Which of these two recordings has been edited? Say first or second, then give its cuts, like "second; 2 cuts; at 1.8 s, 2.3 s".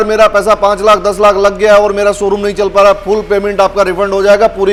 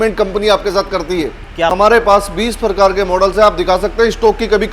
second; 1 cut; at 1.7 s